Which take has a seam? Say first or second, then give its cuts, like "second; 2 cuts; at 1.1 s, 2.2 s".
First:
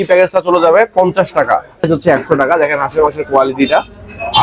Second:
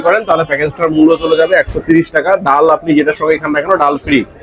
first; 1 cut; at 1.9 s